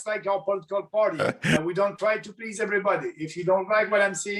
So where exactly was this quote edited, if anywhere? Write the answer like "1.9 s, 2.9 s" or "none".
1.6 s